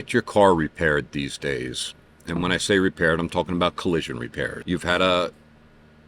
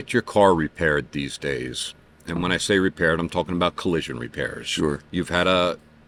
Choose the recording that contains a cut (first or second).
first